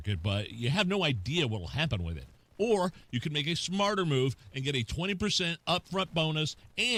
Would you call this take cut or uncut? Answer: uncut